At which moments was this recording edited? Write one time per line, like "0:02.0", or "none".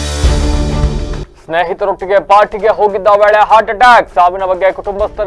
0:01.2

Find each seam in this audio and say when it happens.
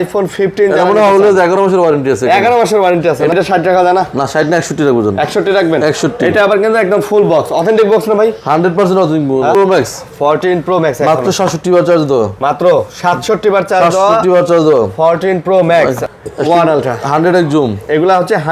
0:03.3
0:09.5
0:16.0

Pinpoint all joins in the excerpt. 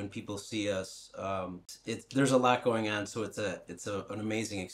0:01.7

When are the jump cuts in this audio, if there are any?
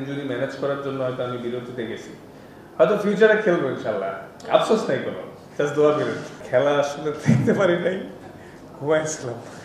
0:06.3

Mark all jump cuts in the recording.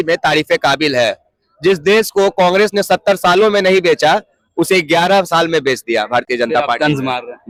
none

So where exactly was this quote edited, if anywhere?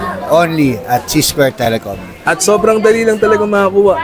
0:02.1

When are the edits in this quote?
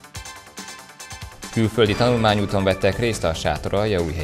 none

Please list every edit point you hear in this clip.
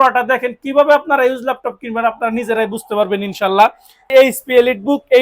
0:04.1

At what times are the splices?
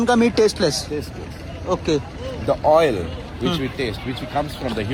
none

